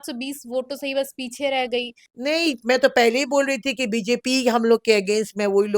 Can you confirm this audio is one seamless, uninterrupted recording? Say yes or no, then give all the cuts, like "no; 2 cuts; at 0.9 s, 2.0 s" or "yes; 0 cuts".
no; 1 cut; at 2.0 s